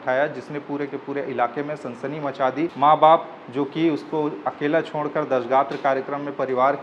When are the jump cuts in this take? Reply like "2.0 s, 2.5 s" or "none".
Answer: 2.7 s